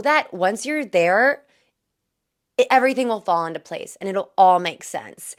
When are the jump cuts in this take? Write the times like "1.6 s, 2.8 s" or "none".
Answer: none